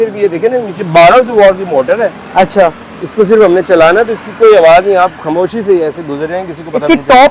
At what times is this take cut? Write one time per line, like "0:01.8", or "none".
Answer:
none